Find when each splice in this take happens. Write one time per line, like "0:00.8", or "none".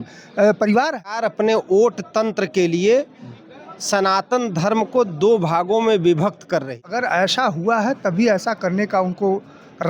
0:01.1
0:06.9